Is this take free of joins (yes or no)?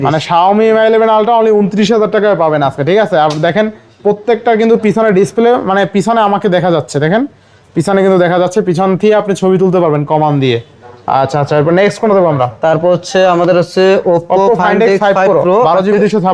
yes